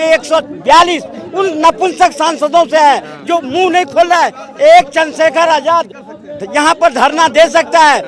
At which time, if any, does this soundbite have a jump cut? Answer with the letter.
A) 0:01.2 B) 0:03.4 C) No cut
C